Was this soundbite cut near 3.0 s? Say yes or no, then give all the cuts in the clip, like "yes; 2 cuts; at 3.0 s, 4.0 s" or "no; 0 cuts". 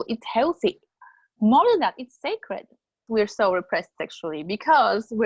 yes; 1 cut; at 3.0 s